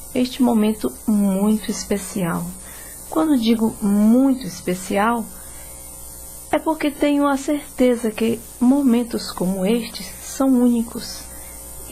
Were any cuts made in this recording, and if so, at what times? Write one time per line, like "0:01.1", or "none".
0:06.3